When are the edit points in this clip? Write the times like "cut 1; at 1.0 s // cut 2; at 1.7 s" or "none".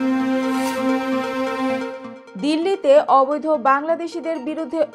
none